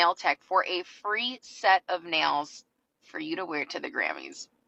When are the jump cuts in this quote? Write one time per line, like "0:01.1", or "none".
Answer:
none